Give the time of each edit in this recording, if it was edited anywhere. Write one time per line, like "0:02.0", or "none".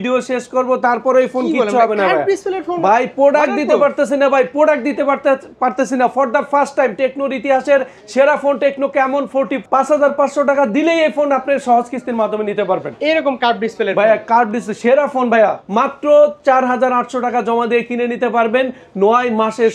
0:09.6
0:15.6